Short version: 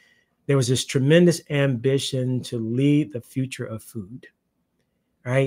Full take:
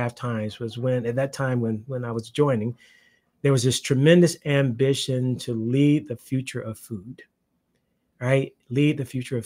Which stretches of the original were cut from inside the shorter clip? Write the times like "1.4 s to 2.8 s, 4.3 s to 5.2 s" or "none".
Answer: none